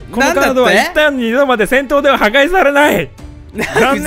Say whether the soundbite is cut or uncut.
uncut